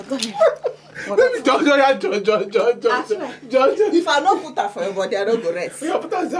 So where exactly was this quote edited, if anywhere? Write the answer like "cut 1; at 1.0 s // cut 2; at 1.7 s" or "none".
none